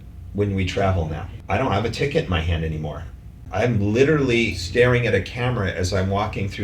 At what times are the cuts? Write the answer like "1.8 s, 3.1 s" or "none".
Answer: 1.3 s, 3.4 s, 4.6 s